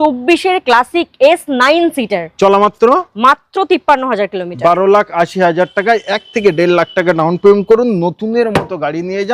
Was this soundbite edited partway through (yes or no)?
no